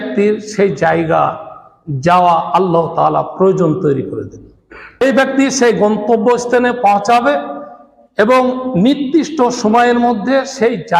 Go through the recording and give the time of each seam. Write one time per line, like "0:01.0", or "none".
0:05.0